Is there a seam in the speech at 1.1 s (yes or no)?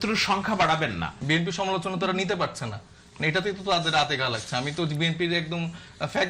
yes